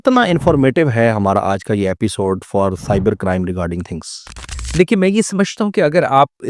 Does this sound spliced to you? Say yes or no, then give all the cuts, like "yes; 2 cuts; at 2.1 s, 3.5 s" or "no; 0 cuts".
yes; 1 cut; at 4.7 s